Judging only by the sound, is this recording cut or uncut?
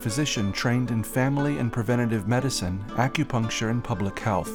uncut